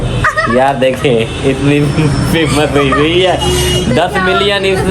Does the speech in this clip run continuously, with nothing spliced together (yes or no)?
yes